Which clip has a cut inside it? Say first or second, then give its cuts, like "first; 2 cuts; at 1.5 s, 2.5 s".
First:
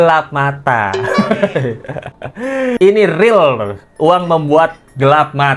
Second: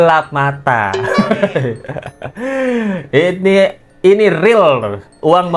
first; 1 cut; at 2.8 s